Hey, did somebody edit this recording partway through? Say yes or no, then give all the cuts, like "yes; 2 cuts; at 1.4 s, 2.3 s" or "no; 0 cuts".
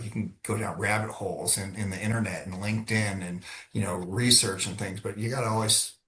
no; 0 cuts